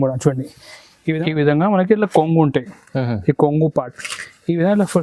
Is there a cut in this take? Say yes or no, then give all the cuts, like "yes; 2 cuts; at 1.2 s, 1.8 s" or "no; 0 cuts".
yes; 1 cut; at 1.2 s